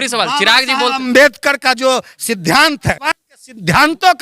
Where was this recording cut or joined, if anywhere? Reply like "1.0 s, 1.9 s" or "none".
3.0 s